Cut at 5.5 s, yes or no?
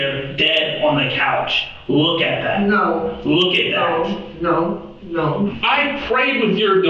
yes